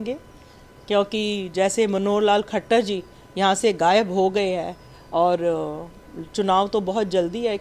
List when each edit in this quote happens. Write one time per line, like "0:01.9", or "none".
none